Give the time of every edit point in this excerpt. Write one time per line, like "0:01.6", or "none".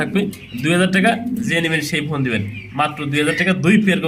none